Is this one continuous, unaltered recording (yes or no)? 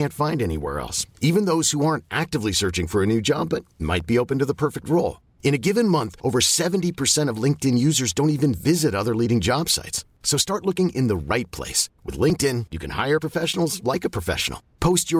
yes